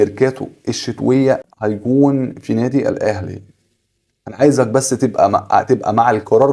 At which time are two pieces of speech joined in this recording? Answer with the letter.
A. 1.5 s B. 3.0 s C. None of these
A